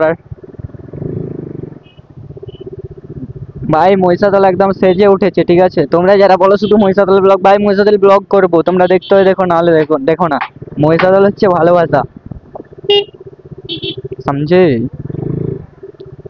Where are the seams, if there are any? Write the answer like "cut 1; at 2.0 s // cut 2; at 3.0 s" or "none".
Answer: none

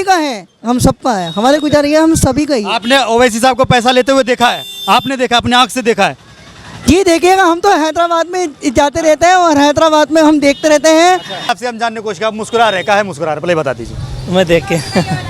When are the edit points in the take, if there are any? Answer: cut 1; at 11.5 s

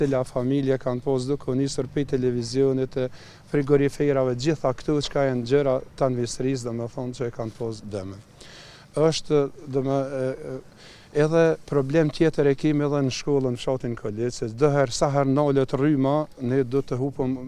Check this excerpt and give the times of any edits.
none

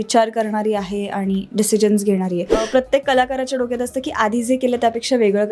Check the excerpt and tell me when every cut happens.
cut 1; at 2.6 s

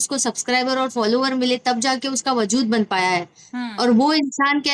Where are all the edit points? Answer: none

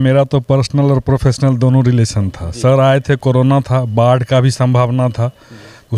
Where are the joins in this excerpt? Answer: none

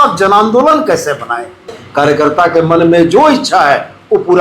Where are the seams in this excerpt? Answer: cut 1; at 1.8 s

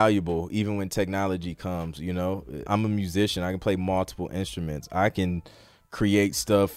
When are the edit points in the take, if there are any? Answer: cut 1; at 2.6 s

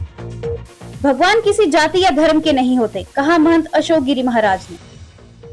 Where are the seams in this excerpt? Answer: cut 1; at 0.9 s // cut 2; at 4.8 s

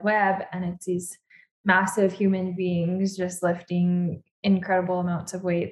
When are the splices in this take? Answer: none

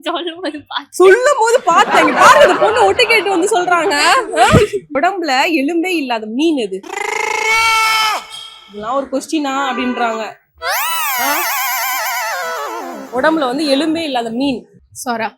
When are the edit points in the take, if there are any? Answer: cut 1; at 4.9 s

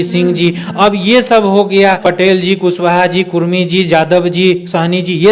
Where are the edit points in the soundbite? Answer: cut 1; at 2.0 s

